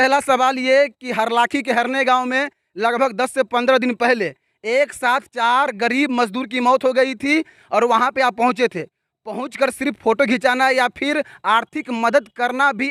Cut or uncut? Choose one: uncut